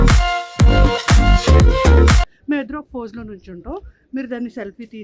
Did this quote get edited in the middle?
yes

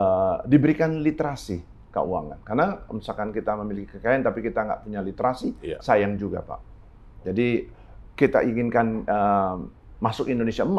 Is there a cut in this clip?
no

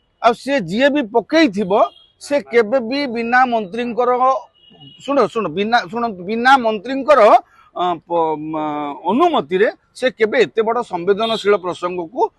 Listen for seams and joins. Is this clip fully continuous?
yes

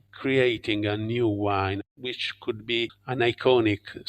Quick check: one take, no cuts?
no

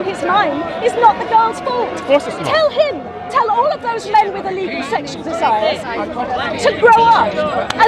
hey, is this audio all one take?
yes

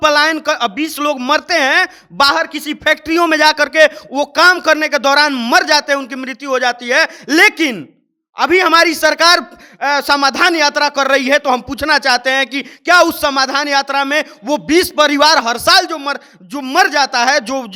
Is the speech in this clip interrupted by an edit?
no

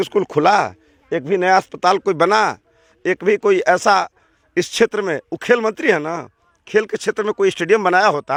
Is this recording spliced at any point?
no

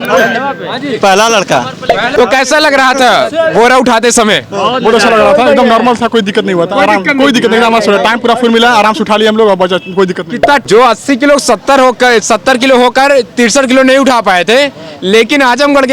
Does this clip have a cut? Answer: yes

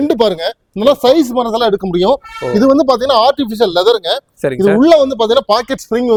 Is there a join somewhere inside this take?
no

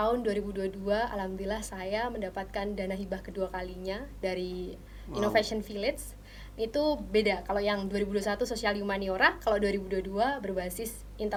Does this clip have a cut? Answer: no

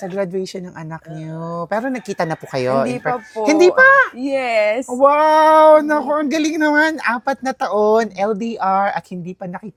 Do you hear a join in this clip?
no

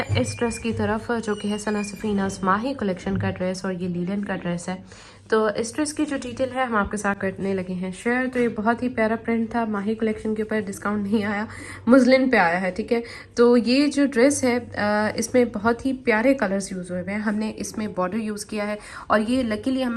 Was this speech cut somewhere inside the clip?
no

